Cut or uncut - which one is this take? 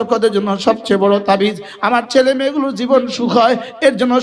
uncut